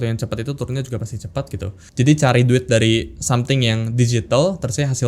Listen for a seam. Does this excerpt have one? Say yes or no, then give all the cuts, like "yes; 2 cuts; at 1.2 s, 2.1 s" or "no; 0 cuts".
yes; 1 cut; at 1.8 s